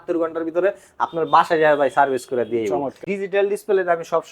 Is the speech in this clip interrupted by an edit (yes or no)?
yes